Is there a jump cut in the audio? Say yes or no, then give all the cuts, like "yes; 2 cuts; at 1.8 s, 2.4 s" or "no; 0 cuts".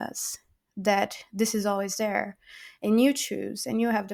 no; 0 cuts